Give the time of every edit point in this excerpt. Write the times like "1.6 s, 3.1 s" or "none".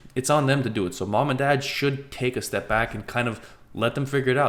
none